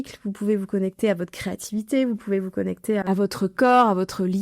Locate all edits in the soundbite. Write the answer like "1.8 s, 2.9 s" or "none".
3.0 s